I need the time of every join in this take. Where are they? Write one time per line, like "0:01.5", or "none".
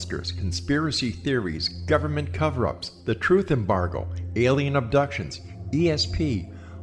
none